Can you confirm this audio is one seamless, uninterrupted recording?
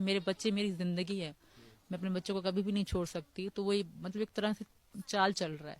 no; 1 cut; at 3.5 s

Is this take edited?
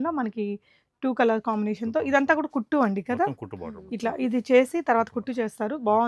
no; 0 cuts

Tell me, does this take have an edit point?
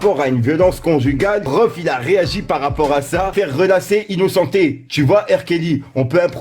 yes; 2 cuts; at 1.5 s, 3.3 s

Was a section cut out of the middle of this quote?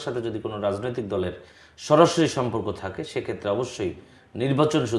no; 0 cuts

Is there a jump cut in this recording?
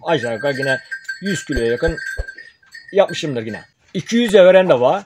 yes; 1 cut; at 3.6 s

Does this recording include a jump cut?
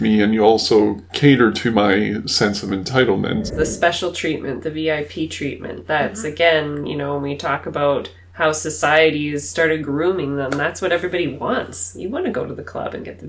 yes; 1 cut; at 3.5 s

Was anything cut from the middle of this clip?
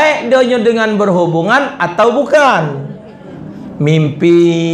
no; 0 cuts

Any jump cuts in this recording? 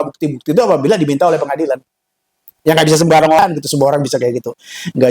yes; 1 cut; at 3.4 s

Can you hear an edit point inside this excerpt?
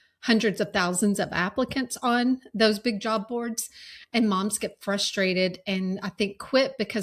no; 0 cuts

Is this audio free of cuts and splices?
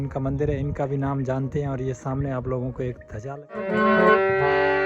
no; 1 cut; at 3.7 s

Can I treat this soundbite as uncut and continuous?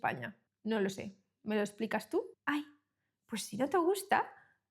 no; 1 cut; at 2.4 s

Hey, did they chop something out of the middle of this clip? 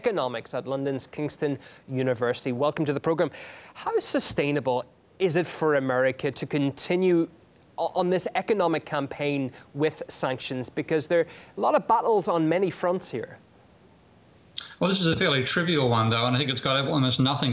no; 0 cuts

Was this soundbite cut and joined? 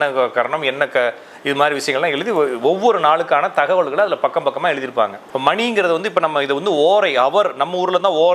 yes; 1 cut; at 5.2 s

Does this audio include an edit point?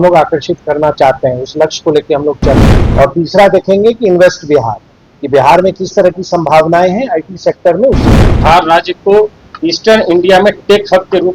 yes; 2 cuts; at 2.8 s, 8.4 s

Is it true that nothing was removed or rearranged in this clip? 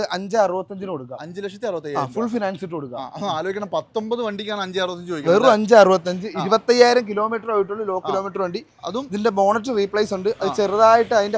yes; 0 cuts

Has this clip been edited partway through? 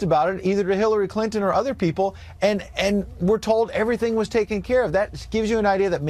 no; 0 cuts

